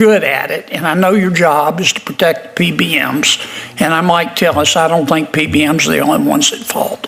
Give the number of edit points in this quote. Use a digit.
0